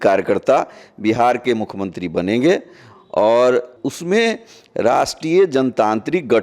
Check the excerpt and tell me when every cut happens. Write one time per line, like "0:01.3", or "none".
0:03.8